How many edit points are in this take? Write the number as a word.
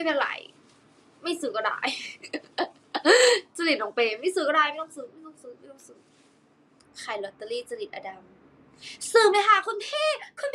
one